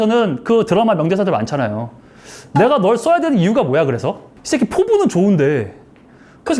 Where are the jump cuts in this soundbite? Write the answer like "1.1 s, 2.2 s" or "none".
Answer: none